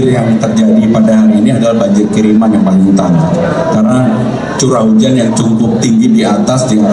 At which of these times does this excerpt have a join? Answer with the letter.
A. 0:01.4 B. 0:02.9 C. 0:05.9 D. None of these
D